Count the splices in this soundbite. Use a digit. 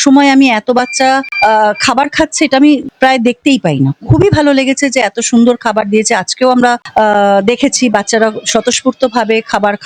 0